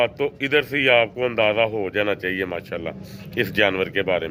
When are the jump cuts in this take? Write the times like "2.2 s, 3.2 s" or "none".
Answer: none